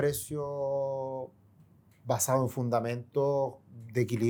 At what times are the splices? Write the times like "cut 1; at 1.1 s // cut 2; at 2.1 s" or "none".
none